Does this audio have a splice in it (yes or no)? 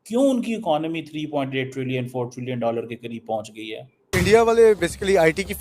yes